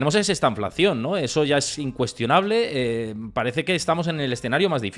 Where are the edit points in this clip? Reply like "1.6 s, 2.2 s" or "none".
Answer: none